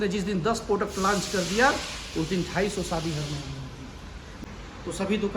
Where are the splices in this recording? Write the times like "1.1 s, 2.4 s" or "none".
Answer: 4.4 s